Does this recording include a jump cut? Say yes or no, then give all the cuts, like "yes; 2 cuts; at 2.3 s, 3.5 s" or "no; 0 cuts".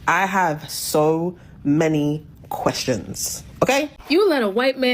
yes; 1 cut; at 4.0 s